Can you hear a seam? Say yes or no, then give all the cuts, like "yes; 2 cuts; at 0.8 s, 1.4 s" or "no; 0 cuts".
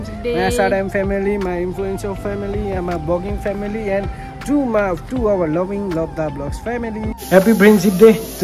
yes; 1 cut; at 7.1 s